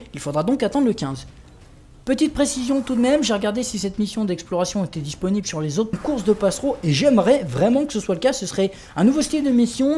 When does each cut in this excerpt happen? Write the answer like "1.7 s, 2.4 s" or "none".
none